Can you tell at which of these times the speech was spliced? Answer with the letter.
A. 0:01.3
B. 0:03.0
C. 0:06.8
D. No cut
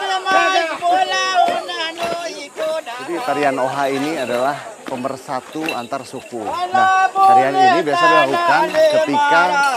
B